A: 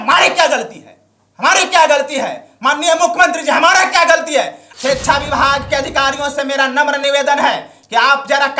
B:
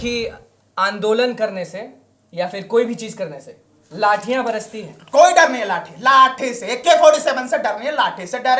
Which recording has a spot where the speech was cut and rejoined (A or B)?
A